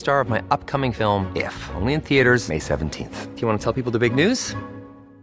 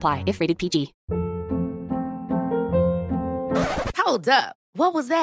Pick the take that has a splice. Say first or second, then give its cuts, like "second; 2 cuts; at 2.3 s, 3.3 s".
second; 1 cut; at 1.0 s